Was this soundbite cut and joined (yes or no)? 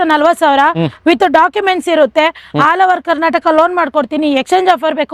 no